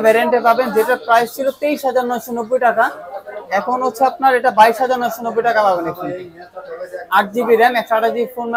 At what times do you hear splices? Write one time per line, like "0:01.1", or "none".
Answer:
none